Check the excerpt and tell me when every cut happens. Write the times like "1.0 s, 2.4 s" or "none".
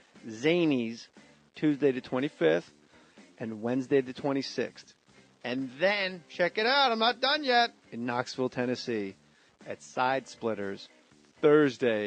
none

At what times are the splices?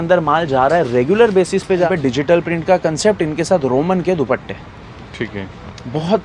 1.9 s

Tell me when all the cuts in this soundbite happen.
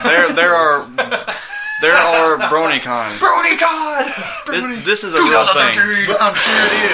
none

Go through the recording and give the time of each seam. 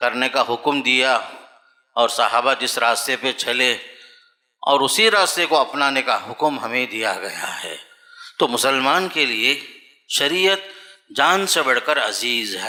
none

